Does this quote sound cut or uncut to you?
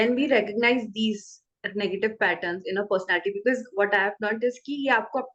uncut